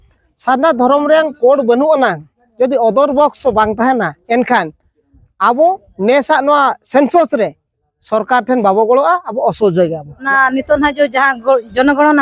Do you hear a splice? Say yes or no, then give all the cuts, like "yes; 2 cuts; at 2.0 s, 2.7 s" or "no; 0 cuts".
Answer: yes; 1 cut; at 10.2 s